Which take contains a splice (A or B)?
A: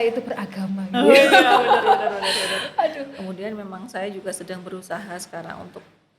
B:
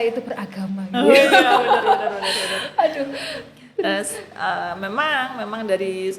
A